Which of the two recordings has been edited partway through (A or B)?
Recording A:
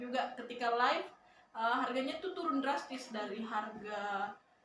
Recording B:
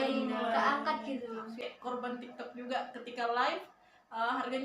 B